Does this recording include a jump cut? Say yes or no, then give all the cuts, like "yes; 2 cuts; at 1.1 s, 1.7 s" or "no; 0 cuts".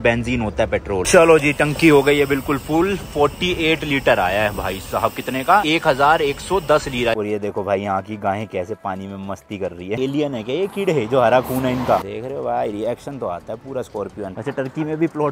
yes; 6 cuts; at 1.1 s, 5.6 s, 7.1 s, 10.0 s, 12.1 s, 14.3 s